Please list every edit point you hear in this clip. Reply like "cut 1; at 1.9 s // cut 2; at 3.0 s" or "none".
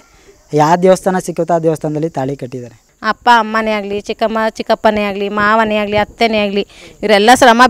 cut 1; at 2.9 s